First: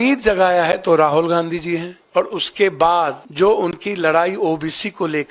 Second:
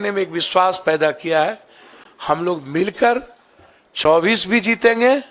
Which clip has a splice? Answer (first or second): first